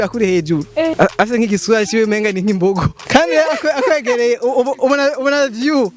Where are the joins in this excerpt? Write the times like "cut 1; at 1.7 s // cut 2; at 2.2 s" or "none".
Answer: cut 1; at 0.9 s // cut 2; at 3.0 s